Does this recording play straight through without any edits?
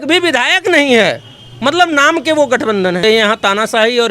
no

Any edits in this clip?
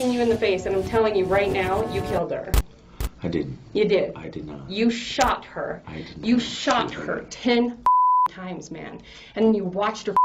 no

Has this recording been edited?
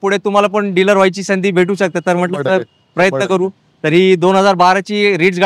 no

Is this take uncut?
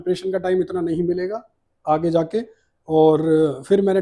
yes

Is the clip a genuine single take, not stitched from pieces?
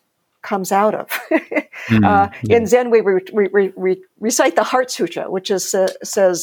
yes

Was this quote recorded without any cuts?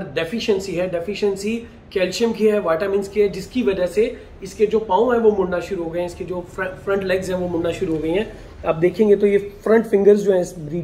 yes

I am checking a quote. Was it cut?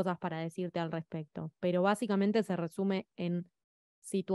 no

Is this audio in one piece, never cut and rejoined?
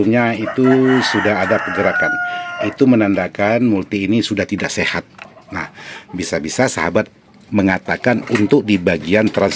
no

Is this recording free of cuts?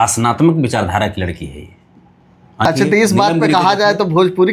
no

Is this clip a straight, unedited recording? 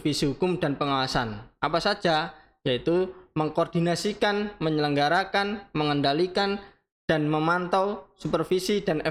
yes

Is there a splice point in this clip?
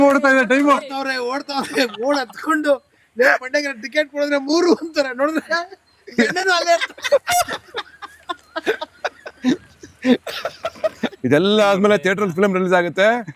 yes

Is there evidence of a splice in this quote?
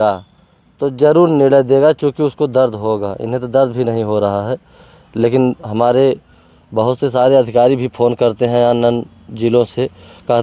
no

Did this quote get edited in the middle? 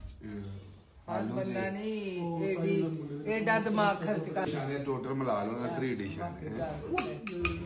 yes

